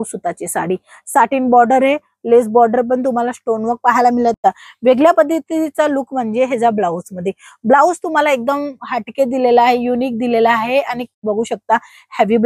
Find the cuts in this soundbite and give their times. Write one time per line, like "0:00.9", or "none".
0:04.4
0:11.1